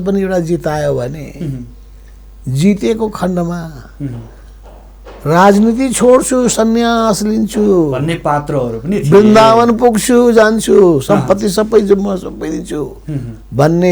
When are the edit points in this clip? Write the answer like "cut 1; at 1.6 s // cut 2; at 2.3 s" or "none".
none